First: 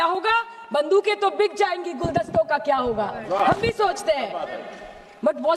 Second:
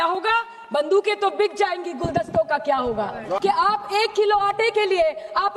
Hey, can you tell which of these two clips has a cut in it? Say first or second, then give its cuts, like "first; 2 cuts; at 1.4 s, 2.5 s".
second; 1 cut; at 3.4 s